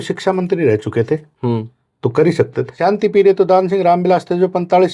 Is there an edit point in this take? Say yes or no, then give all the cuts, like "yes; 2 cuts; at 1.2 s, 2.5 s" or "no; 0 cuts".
yes; 1 cut; at 2.7 s